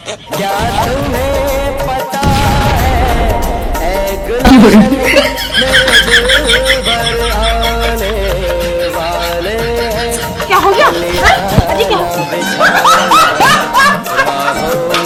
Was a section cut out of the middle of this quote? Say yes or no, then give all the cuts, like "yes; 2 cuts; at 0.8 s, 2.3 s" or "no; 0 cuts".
no; 0 cuts